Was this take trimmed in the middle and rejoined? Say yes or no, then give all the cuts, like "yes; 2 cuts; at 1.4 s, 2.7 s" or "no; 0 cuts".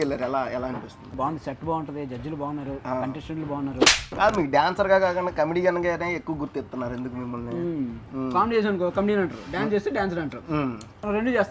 yes; 3 cuts; at 1.0 s, 3.9 s, 8.1 s